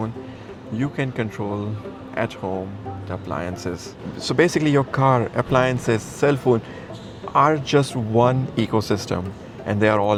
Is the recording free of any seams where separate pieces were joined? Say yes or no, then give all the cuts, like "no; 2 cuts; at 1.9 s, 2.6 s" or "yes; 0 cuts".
yes; 0 cuts